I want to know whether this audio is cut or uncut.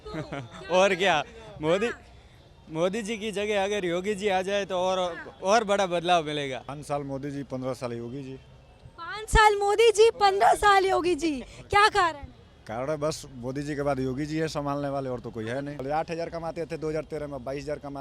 cut